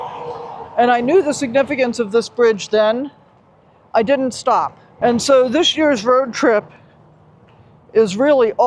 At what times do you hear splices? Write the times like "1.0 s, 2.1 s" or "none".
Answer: 4.8 s